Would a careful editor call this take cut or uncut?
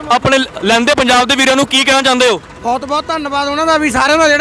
uncut